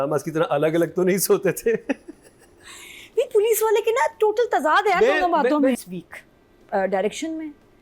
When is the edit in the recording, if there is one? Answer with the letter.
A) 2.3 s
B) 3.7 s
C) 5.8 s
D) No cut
C